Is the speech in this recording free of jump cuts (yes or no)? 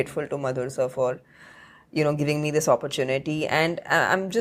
yes